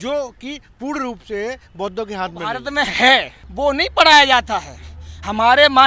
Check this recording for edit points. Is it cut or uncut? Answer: cut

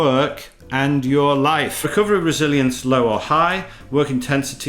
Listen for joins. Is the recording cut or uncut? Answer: cut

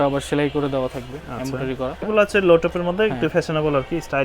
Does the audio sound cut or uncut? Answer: cut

